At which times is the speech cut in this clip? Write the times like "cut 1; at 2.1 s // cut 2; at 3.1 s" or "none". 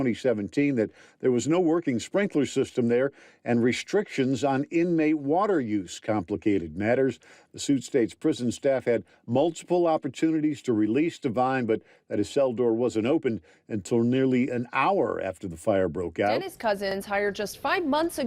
cut 1; at 16.9 s